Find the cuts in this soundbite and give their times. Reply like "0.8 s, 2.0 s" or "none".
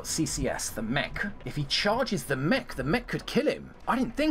1.4 s